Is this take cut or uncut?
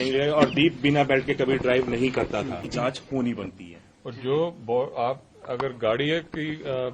cut